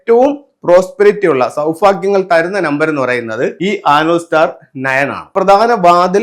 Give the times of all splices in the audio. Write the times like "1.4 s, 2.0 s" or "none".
3.6 s, 5.3 s